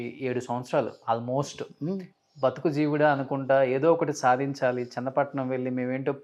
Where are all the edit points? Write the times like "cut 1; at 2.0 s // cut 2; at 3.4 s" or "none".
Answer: none